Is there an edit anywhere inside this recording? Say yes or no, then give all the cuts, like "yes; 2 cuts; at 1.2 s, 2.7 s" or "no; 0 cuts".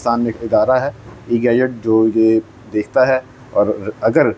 no; 0 cuts